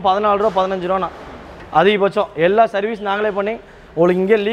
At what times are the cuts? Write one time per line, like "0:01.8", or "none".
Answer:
none